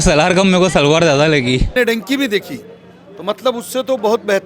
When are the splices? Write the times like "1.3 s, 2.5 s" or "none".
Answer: 1.7 s